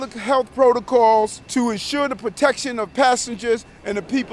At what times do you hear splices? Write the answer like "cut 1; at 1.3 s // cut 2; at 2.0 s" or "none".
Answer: cut 1; at 1.4 s